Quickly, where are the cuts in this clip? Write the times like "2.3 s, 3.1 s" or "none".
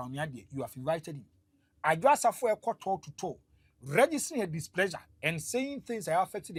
none